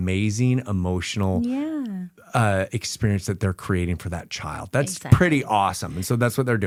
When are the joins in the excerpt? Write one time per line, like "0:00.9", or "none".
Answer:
none

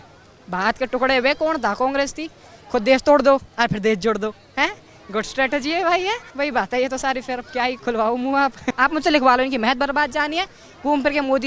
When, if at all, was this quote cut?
0:06.3
0:08.7

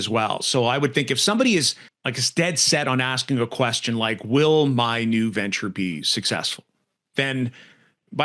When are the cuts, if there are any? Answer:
none

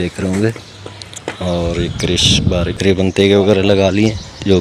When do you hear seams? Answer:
0:02.8

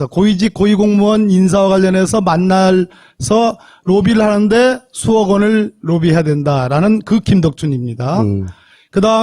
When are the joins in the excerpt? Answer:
0:06.5

